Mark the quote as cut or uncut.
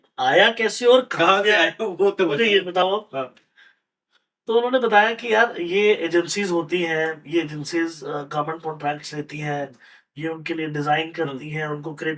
uncut